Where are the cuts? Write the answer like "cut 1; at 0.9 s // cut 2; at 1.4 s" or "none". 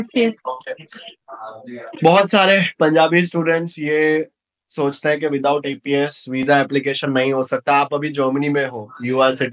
none